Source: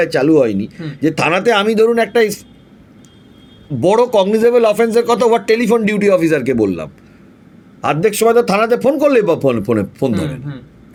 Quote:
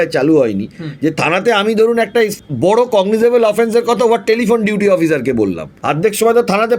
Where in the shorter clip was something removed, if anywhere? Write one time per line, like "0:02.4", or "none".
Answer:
0:02.4
0:05.7